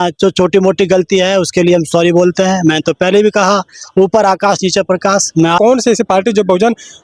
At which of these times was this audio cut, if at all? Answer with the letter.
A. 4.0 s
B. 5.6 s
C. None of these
B